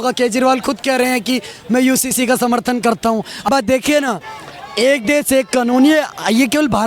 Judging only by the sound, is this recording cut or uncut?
cut